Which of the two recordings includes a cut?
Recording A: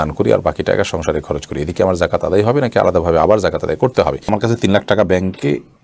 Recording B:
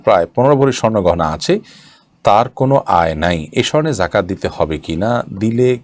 A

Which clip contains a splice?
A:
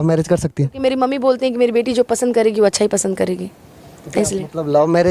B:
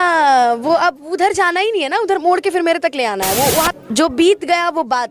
B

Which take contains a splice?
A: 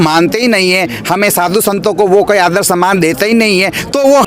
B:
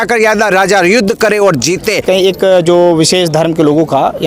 B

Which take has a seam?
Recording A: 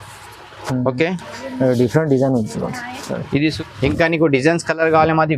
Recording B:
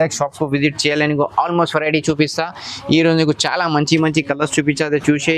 A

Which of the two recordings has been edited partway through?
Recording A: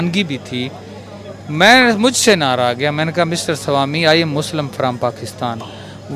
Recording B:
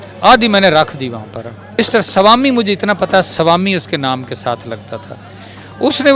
B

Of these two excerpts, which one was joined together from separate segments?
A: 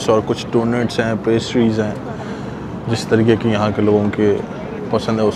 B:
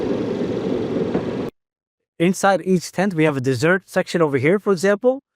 B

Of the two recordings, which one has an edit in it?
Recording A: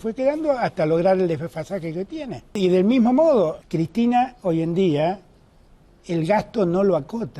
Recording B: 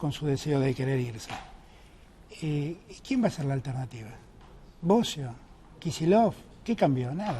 A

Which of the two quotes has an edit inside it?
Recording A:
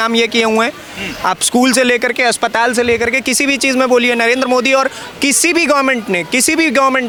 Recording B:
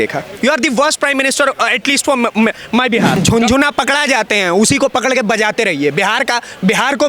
B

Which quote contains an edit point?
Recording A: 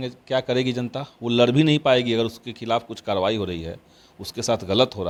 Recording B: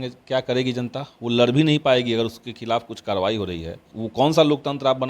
B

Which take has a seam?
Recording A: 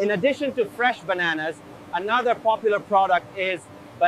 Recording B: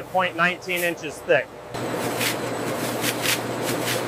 B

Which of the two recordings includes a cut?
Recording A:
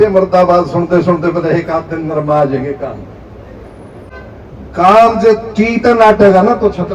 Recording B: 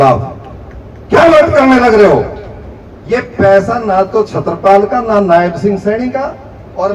A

